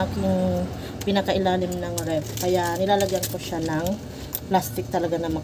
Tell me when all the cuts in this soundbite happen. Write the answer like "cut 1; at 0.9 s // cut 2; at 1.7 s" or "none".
none